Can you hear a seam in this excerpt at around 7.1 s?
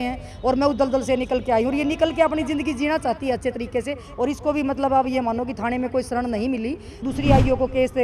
yes; 1 cut; at 7.1 s

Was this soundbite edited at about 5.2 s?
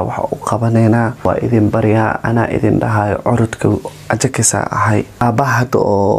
yes; 2 cuts; at 1.1 s, 5.2 s

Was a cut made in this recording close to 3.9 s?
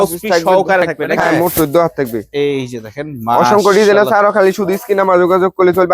no; 1 cut; at 1.0 s

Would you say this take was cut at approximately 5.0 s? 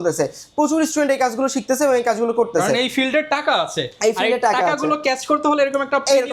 no; 0 cuts

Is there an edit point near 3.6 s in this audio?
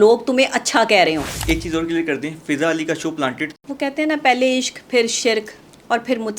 yes; 2 cuts; at 1.3 s, 3.6 s

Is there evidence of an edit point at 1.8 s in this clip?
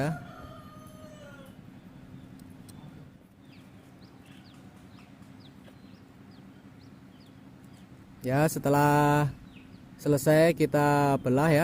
no; 1 cut; at 3.2 s

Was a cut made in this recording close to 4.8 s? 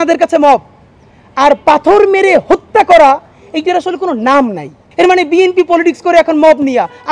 yes; 1 cut; at 4.8 s

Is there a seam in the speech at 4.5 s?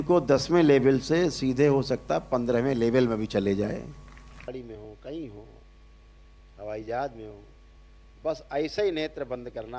yes; 1 cut; at 4.5 s

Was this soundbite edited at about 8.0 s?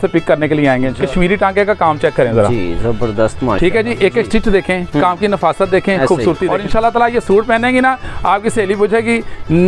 no; 2 cuts; at 0.9 s, 6.5 s

